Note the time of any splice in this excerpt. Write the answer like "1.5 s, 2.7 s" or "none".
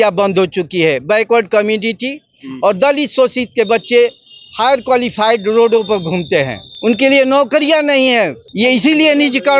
6.6 s, 8.4 s